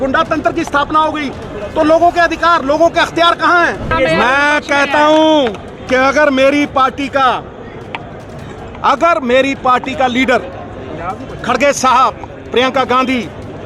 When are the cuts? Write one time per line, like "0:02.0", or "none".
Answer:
0:03.9